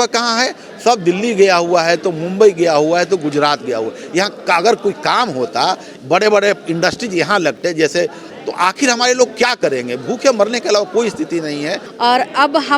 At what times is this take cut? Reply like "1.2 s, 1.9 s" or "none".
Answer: 8.3 s, 11.8 s

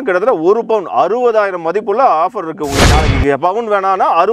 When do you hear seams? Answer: 2.9 s

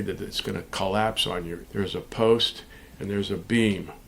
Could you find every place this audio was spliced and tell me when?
1.6 s

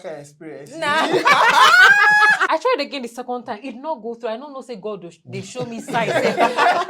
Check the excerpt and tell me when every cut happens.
2.4 s

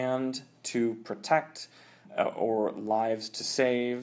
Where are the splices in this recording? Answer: none

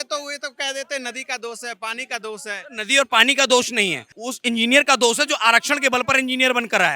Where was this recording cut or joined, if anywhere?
none

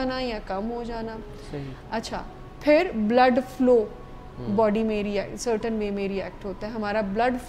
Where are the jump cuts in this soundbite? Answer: none

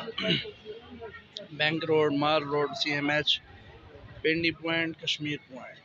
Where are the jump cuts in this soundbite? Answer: none

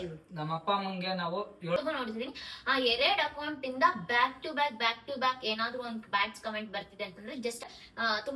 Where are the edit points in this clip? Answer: 1.8 s, 7.6 s

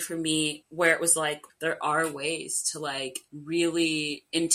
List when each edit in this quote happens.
1.5 s

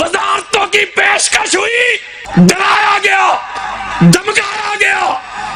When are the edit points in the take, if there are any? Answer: 2.1 s

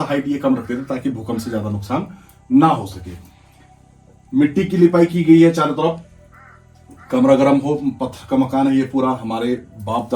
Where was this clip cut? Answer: none

